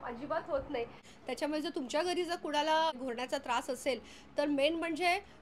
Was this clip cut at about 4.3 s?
no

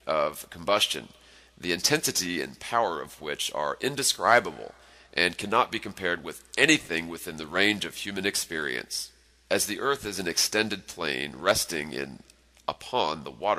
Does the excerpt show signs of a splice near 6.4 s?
yes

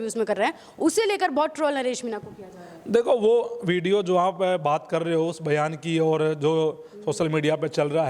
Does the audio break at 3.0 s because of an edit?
no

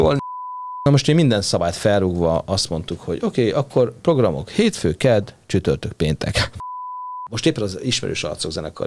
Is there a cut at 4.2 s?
no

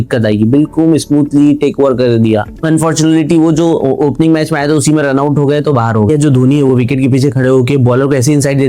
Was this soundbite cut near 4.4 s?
no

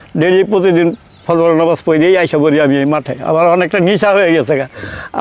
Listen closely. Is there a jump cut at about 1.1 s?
no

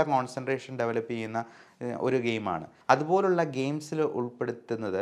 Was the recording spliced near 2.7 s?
yes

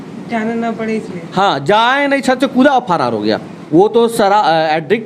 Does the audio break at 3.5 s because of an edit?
yes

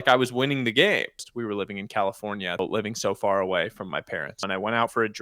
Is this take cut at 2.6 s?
yes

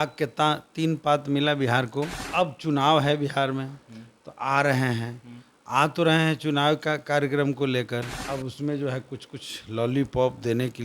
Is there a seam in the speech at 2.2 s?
yes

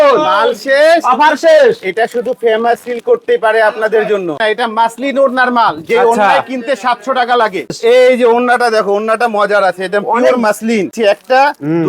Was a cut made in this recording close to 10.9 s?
yes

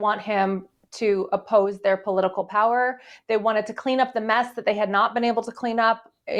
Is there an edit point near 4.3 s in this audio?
no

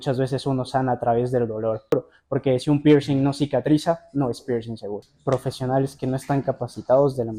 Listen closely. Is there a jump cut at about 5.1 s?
yes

